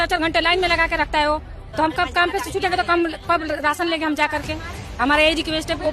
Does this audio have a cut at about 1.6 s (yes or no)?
no